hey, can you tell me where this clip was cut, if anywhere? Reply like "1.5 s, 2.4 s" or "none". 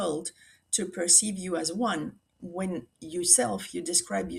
none